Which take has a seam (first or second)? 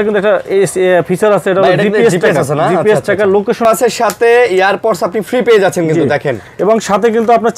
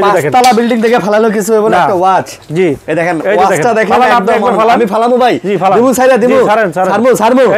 first